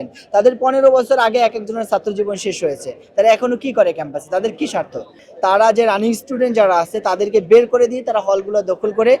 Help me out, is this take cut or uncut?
cut